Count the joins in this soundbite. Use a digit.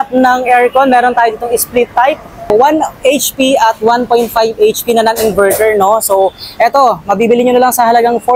1